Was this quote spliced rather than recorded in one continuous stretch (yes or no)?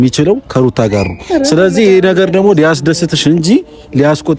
no